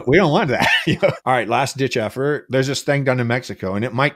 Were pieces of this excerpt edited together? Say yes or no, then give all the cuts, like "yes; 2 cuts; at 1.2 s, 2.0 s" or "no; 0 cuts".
yes; 2 cuts; at 1.1 s, 2.4 s